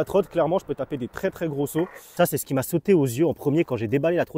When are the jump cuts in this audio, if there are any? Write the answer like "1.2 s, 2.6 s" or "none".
2.1 s